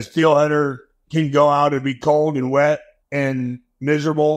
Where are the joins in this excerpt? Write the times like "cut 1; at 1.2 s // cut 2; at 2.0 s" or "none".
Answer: cut 1; at 3.0 s